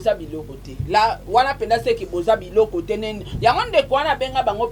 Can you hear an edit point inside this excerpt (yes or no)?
no